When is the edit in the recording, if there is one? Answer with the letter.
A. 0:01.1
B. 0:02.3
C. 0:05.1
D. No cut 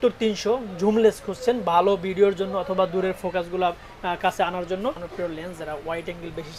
C